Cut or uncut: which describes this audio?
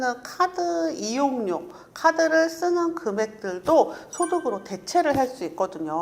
uncut